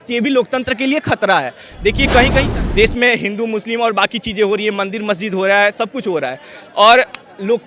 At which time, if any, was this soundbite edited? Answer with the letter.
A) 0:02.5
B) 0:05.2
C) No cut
A